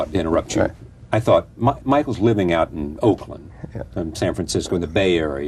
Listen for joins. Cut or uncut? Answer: cut